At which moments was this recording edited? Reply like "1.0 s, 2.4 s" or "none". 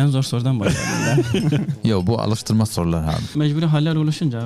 3.3 s